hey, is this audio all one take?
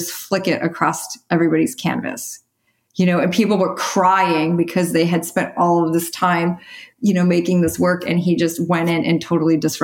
yes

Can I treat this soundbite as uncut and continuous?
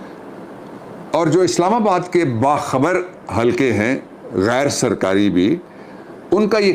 yes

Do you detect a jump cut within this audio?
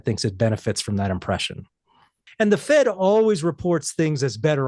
yes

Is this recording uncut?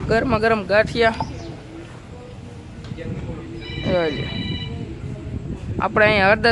yes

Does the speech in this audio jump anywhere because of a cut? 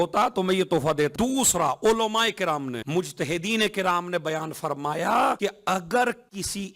yes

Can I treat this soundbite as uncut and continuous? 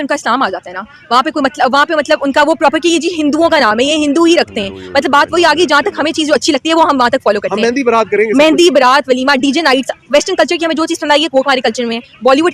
yes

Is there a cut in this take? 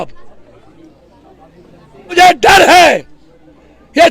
yes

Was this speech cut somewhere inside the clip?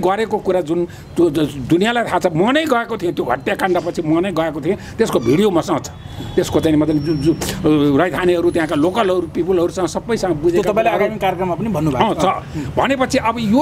no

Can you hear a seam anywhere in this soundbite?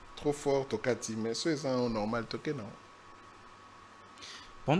no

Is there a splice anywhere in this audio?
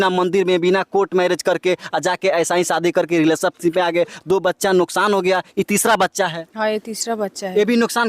no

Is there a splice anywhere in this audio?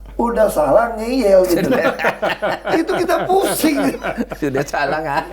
no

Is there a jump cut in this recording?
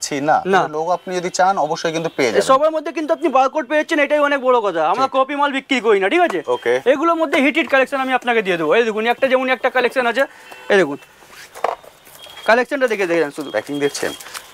no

